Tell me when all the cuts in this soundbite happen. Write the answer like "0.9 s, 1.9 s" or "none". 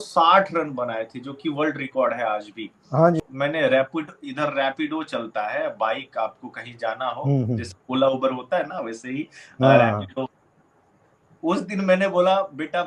3.2 s